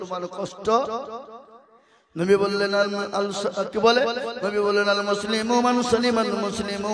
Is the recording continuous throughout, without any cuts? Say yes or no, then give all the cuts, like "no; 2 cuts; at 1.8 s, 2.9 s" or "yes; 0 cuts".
yes; 0 cuts